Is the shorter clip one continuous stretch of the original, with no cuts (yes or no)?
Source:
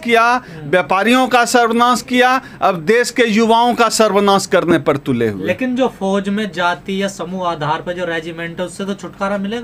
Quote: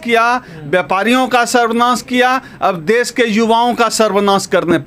yes